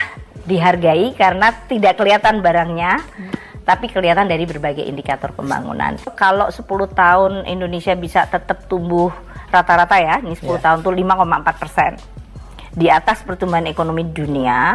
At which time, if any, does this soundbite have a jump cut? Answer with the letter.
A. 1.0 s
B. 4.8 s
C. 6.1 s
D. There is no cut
C